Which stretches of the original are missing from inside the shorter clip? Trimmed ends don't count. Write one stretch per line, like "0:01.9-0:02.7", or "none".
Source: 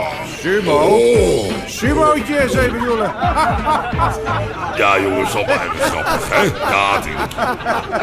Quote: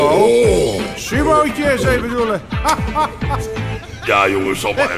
none